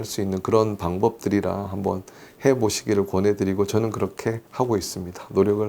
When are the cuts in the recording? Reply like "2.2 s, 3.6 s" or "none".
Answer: 4.4 s